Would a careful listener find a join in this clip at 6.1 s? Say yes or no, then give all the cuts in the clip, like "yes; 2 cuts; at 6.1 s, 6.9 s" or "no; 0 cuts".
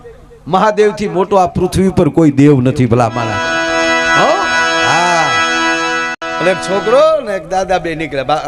yes; 1 cut; at 6.1 s